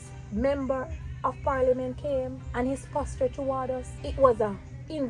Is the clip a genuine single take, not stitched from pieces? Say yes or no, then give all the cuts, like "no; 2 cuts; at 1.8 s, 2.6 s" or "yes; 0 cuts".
no; 2 cuts; at 2.4 s, 4.0 s